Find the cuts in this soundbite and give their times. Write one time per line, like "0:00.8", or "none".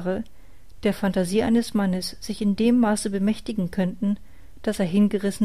0:01.0